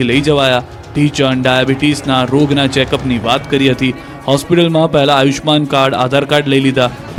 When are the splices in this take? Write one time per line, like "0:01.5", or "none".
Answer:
none

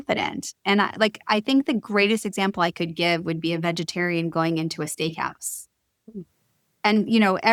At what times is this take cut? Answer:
none

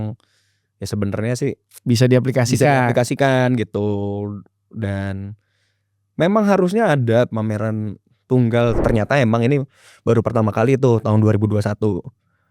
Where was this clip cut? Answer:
0:08.8

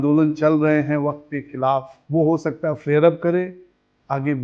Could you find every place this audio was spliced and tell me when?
0:02.0

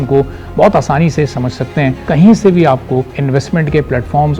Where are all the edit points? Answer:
0:02.0
0:03.2

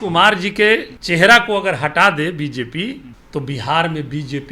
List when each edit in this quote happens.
0:00.9
0:03.1

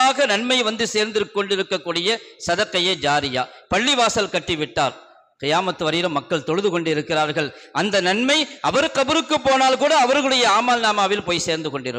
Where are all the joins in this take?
none

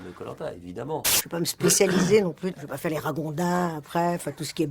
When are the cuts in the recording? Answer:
0:01.2
0:02.5

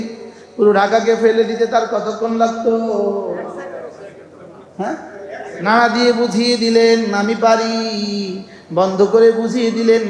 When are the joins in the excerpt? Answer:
none

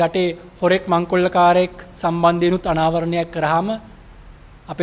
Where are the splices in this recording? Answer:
none

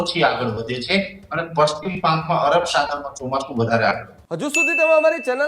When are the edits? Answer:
0:04.1

